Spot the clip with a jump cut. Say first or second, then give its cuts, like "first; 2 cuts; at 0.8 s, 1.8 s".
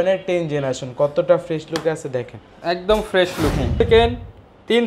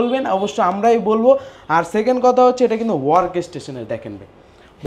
first; 1 cut; at 3.8 s